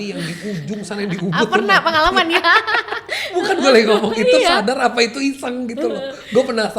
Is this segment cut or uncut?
uncut